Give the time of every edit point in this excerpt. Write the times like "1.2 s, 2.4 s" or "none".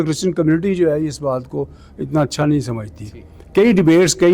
none